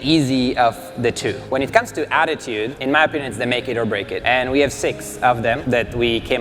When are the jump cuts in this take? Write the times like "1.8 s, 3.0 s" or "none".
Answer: 1.4 s, 2.8 s, 4.2 s, 5.6 s

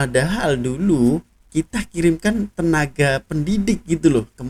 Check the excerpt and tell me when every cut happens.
none

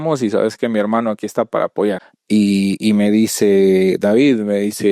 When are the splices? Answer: 2.1 s

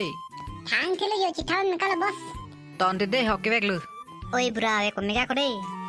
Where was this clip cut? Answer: none

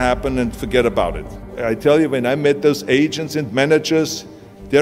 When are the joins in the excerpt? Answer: 1.5 s

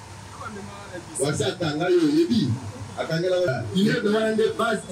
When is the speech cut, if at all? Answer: 3.5 s

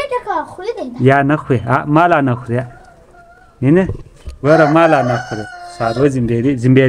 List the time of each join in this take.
none

